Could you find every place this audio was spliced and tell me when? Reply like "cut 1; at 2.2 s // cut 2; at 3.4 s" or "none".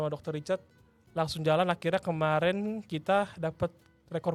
none